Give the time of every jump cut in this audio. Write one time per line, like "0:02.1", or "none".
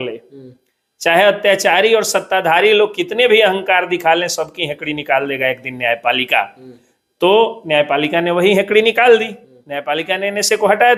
none